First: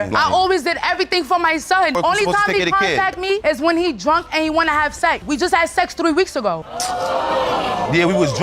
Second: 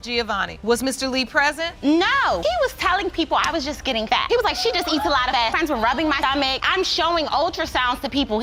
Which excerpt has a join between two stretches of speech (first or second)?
first